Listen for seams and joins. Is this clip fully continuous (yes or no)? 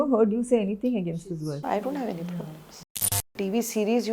no